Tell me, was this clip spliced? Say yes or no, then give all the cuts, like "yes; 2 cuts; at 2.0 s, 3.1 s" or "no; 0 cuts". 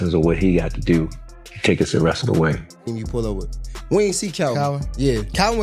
yes; 1 cut; at 2.9 s